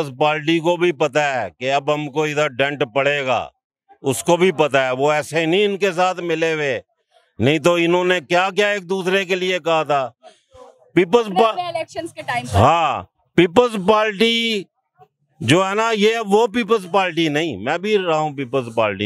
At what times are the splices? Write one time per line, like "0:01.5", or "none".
none